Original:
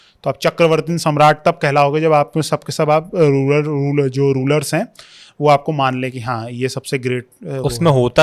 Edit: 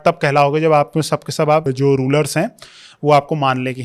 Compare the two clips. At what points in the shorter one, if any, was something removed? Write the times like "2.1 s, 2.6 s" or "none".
1.7 s